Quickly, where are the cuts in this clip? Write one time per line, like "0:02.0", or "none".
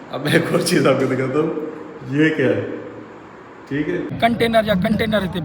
0:04.1